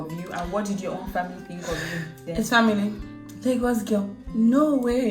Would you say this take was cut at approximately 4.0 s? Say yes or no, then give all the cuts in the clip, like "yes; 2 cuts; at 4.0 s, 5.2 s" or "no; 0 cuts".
no; 1 cut; at 2.1 s